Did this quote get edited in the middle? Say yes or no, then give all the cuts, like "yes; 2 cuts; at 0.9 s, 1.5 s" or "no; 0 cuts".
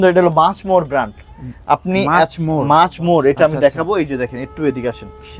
no; 0 cuts